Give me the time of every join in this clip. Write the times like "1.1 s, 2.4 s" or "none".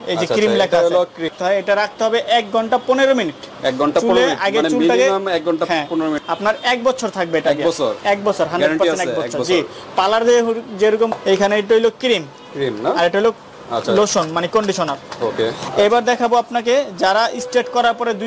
1.3 s, 6.2 s, 11.1 s, 15.6 s